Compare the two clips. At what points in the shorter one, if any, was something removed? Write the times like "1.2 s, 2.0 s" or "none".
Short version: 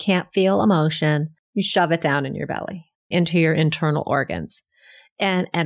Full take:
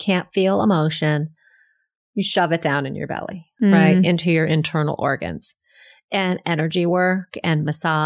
1.4 s, 3.1 s